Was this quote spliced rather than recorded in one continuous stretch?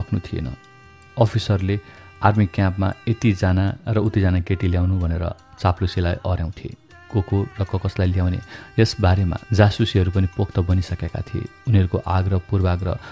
no; 0 cuts

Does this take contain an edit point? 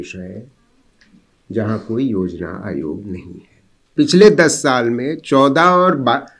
yes; 1 cut; at 3.9 s

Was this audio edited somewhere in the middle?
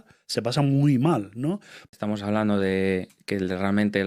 yes; 1 cut; at 1.8 s

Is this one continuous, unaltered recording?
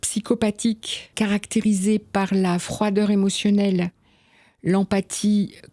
no; 1 cut; at 1.1 s

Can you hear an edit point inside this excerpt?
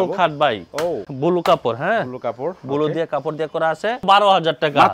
yes; 2 cuts; at 1.1 s, 4.0 s

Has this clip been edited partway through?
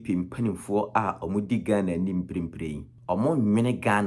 yes; 1 cut; at 2.9 s

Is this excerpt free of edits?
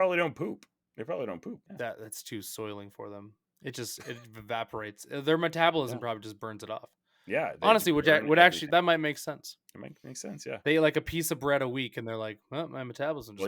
no; 2 cuts; at 1.7 s, 8.6 s

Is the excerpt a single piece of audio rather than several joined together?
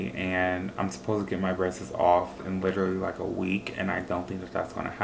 yes; 0 cuts

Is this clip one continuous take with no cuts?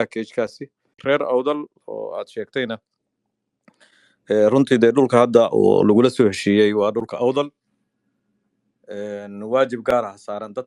no; 1 cut; at 0.9 s

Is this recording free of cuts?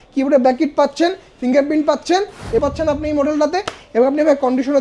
no; 1 cut; at 2.6 s

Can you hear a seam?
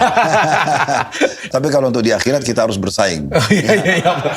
yes; 1 cut; at 1.5 s

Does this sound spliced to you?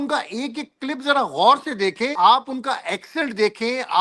yes; 1 cut; at 2.1 s

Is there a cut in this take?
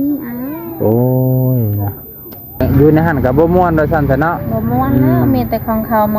yes; 1 cut; at 2.6 s

